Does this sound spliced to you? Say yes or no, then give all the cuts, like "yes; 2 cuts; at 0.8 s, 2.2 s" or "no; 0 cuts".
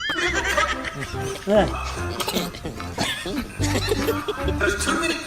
no; 0 cuts